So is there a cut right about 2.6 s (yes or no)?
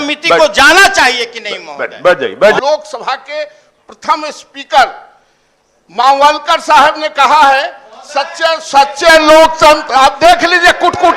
yes